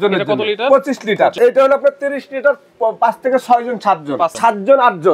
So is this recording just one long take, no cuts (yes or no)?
no